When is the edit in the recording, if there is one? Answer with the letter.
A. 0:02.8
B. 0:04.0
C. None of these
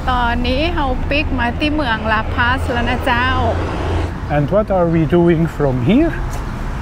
B